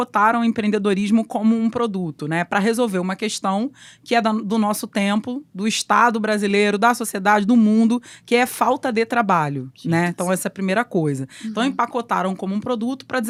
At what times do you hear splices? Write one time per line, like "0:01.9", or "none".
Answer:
none